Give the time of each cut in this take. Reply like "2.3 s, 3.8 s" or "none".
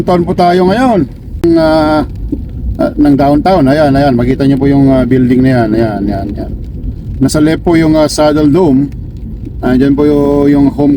1.4 s